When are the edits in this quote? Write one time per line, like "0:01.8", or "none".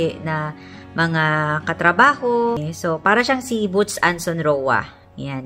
0:02.7